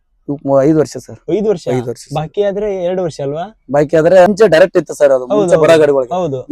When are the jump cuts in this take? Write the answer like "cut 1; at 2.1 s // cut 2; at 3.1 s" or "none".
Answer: cut 1; at 4.3 s